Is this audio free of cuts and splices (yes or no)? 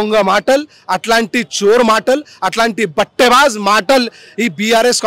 yes